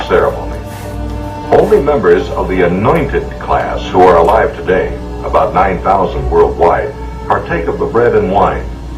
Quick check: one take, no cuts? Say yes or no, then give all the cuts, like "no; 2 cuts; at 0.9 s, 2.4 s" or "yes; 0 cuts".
yes; 0 cuts